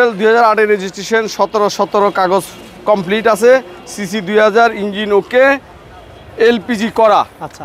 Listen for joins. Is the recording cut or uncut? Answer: uncut